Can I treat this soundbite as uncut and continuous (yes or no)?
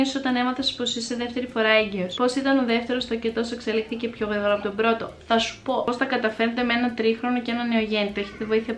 no